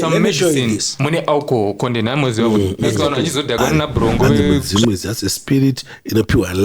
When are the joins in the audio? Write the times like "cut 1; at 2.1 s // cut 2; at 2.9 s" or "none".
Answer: cut 1; at 4.7 s

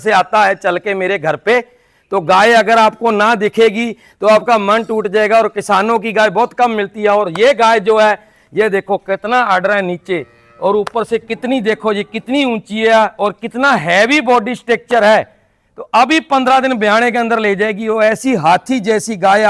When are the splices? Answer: none

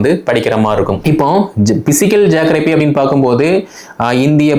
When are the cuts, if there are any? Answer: cut 1; at 1.0 s

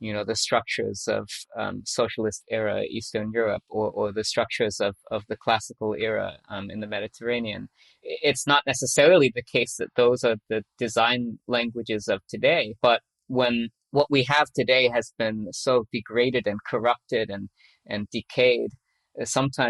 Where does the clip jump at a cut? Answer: none

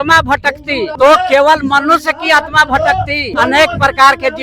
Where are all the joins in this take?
cut 1; at 0.9 s // cut 2; at 3.3 s

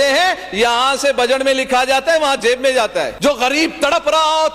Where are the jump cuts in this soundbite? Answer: cut 1; at 3.1 s

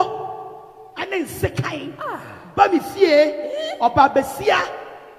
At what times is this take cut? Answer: none

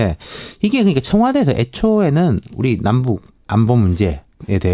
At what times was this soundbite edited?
cut 1; at 2.0 s

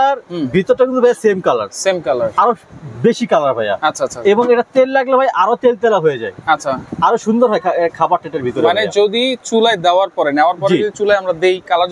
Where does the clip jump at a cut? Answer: none

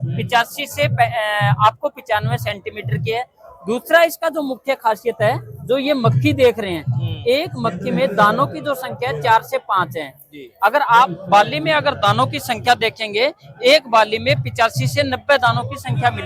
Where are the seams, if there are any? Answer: none

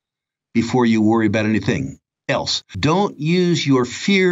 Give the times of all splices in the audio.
cut 1; at 2.6 s

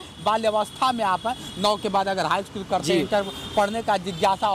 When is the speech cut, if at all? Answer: none

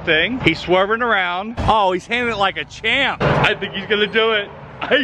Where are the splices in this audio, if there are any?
cut 1; at 1.5 s // cut 2; at 3.2 s

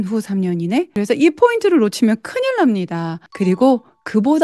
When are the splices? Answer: cut 1; at 3.2 s

